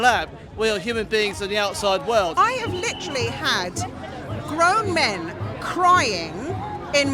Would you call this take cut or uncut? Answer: cut